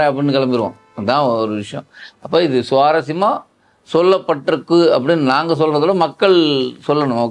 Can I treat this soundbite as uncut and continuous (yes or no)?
yes